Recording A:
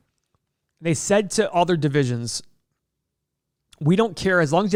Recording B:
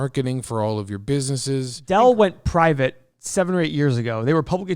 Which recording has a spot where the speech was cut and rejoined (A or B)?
B